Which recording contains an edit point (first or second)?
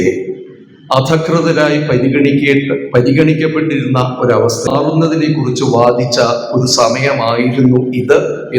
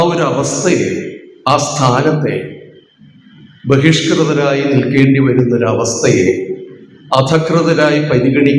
first